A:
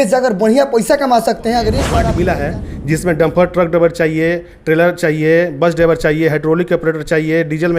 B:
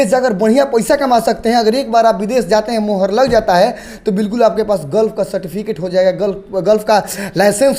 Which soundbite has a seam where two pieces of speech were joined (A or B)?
A